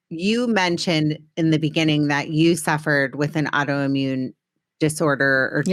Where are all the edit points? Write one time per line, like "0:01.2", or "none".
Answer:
none